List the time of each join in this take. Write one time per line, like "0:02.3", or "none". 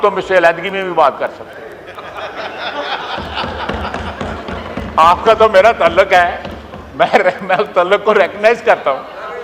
none